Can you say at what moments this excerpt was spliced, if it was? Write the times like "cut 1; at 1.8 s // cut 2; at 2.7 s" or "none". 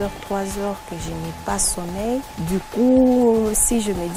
none